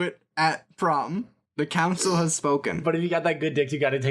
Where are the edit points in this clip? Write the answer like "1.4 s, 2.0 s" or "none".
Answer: 2.7 s